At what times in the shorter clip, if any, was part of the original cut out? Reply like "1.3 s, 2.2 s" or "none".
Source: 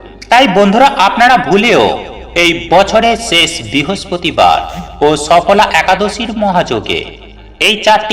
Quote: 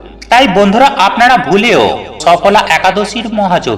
2.2 s

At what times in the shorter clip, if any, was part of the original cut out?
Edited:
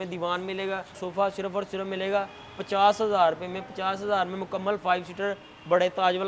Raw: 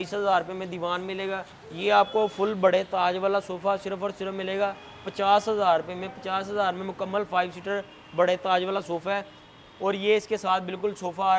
1.0 s

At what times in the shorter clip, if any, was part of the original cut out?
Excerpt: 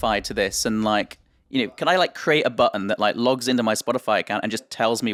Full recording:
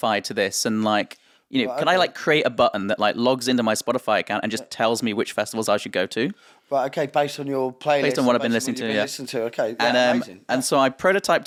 none

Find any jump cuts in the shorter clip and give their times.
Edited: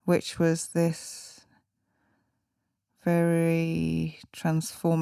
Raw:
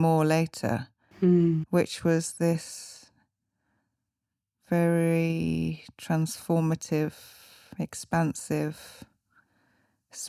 none

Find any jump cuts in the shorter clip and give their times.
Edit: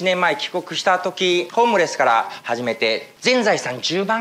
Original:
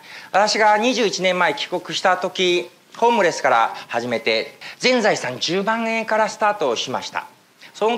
1.5 s, 3.1 s

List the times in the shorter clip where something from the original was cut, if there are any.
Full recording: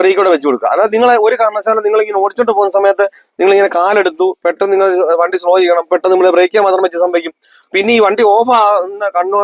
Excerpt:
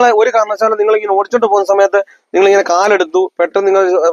none

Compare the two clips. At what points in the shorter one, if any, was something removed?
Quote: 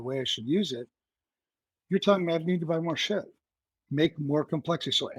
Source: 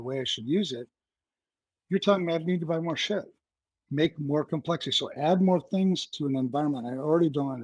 none

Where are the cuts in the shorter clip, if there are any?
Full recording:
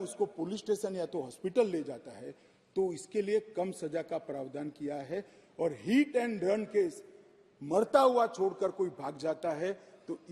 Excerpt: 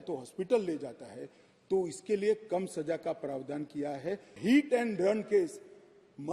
4.4 s

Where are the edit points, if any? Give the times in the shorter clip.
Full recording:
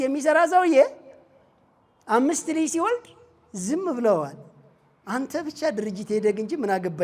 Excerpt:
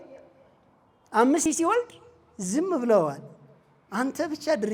1.5 s

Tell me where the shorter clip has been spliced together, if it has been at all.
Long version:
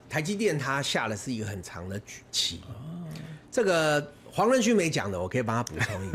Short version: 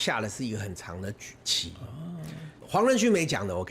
2.5 s

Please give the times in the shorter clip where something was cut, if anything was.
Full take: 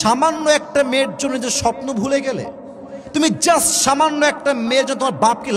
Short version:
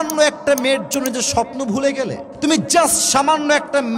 2.2 s

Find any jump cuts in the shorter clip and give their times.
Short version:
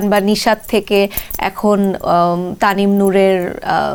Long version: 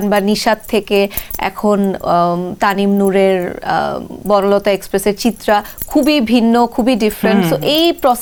none

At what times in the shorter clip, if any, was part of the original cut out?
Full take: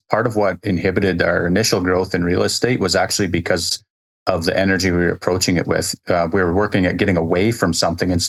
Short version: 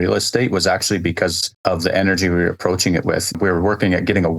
1.5 s, 3.4 s

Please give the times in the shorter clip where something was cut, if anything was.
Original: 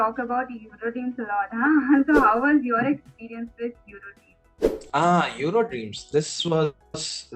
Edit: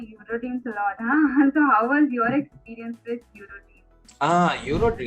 4.1 s

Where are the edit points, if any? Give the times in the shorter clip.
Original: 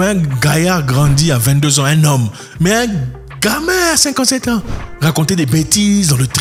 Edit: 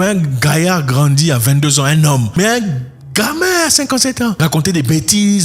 2.3 s, 4.4 s

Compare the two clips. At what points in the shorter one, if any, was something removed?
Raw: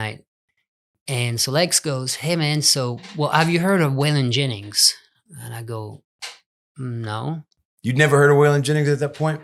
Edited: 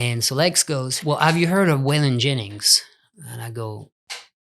0.9 s

